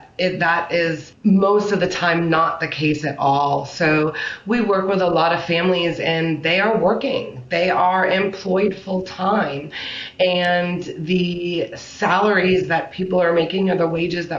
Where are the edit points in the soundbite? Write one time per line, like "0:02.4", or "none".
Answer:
0:01.1